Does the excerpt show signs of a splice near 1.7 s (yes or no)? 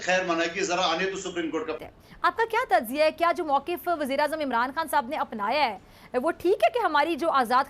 yes